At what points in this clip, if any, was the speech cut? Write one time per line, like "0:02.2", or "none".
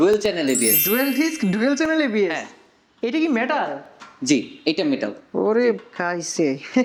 none